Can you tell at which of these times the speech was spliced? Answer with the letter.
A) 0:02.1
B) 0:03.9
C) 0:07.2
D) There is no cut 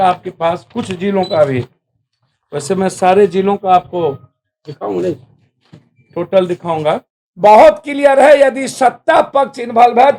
C